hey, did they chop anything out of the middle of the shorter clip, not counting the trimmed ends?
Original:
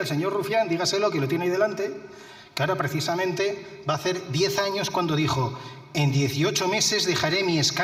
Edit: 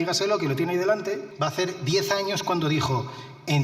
yes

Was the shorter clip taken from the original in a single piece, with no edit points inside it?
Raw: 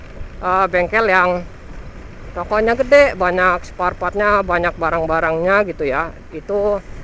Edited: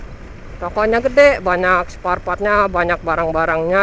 yes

